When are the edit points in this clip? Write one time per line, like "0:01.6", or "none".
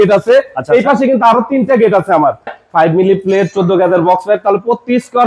0:02.5